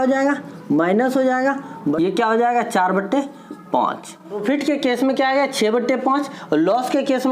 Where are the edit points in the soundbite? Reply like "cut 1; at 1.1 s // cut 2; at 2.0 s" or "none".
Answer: cut 1; at 2.0 s // cut 2; at 4.4 s